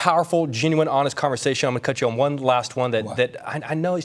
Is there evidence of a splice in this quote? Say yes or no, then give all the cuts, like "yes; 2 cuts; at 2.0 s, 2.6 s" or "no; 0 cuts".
no; 0 cuts